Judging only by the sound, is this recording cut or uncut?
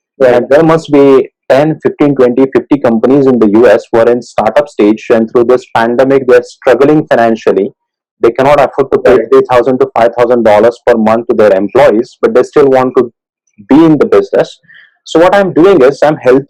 uncut